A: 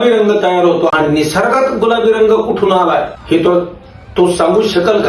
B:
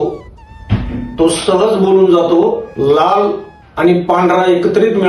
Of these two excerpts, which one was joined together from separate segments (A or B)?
A